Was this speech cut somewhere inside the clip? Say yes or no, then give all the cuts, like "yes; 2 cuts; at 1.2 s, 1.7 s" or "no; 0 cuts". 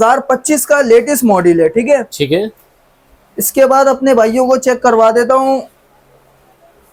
no; 0 cuts